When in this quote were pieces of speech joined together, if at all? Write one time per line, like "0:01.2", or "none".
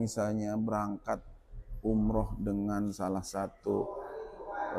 none